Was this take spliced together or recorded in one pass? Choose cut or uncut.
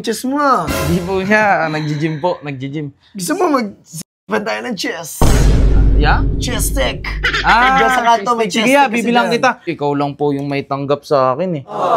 cut